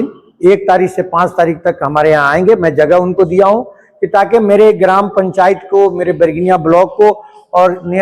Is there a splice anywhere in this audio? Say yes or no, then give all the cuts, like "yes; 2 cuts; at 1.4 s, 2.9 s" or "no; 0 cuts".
no; 0 cuts